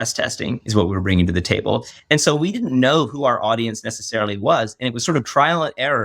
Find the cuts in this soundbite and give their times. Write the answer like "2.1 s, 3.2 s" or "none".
1.9 s